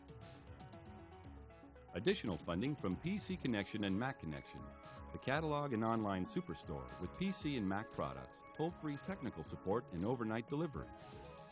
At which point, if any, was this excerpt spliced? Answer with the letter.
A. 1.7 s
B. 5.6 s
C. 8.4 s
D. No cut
A